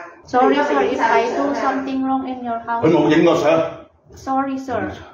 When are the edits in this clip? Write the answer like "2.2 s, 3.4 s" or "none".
none